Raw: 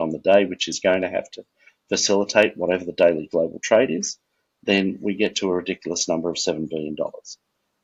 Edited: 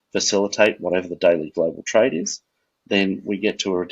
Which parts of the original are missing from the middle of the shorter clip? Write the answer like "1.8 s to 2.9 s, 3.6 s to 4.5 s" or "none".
none